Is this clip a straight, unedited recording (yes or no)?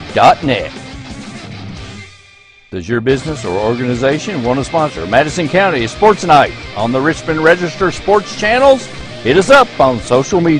yes